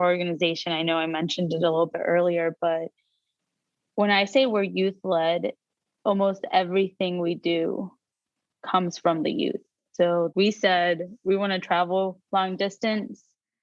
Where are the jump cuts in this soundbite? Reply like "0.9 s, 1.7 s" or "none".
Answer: 12.2 s